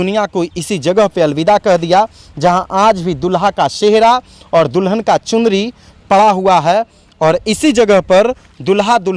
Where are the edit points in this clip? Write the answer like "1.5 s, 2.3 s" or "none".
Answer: none